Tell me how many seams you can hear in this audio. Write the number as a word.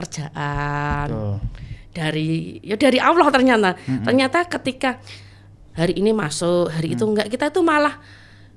zero